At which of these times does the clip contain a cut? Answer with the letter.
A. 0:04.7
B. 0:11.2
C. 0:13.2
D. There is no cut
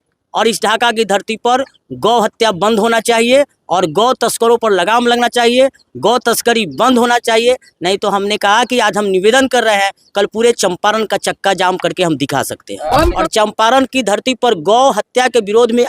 C